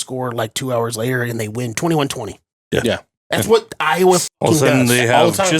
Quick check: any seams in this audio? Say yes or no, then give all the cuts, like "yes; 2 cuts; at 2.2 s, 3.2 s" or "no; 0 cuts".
yes; 1 cut; at 1.8 s